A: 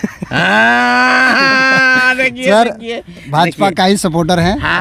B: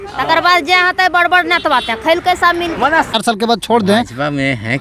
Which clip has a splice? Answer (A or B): B